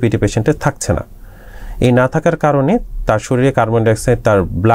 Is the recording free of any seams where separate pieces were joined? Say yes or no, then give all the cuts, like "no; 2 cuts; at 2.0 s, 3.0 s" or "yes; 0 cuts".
yes; 0 cuts